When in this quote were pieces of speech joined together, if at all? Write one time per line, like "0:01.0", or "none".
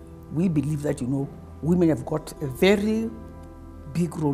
0:01.0